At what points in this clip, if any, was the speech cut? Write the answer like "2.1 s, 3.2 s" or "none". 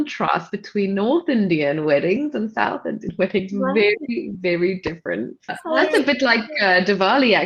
5.8 s